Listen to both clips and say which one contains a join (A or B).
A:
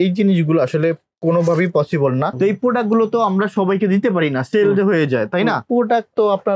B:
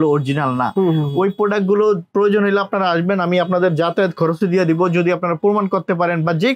A